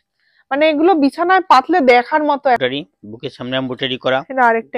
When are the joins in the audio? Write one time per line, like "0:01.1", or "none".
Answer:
0:02.6